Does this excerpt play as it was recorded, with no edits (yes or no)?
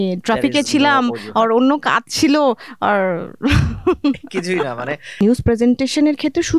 no